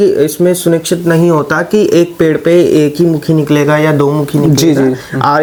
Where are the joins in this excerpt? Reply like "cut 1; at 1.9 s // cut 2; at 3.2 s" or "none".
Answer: none